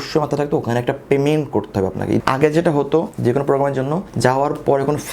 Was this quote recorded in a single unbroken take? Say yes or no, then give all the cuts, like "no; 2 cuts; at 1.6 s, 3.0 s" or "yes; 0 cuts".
no; 3 cuts; at 2.2 s, 3.1 s, 4.1 s